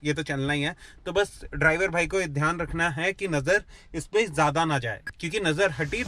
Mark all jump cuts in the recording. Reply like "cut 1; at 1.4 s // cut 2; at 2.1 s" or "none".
none